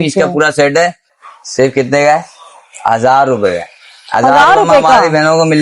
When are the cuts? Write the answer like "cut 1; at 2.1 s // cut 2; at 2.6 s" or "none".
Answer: cut 1; at 1.1 s